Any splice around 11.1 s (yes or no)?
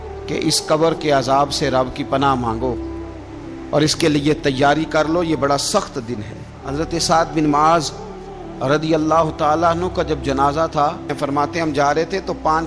yes